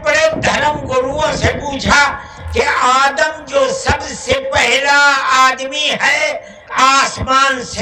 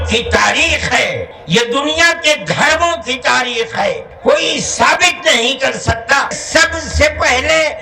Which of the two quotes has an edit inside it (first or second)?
second